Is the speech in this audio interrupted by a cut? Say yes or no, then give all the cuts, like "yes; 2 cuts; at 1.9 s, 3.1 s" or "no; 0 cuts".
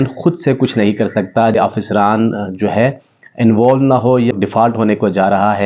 yes; 2 cuts; at 1.6 s, 4.3 s